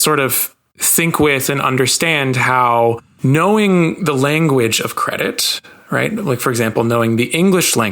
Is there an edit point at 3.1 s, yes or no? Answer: yes